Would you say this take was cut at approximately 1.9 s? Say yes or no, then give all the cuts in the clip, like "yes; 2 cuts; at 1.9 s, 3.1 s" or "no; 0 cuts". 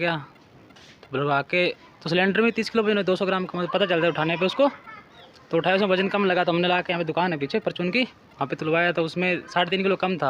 yes; 1 cut; at 1.9 s